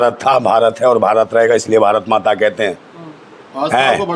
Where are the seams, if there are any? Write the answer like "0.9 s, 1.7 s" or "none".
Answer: none